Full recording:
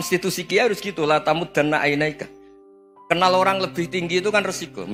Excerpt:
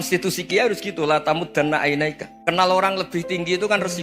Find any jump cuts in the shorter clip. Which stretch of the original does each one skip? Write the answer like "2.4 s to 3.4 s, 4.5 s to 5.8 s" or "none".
2.3 s to 2.9 s